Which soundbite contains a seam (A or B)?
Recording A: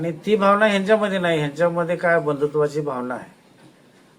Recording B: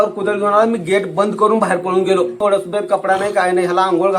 B